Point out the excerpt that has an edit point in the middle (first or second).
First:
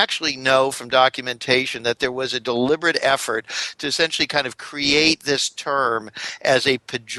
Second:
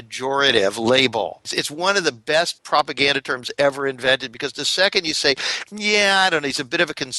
second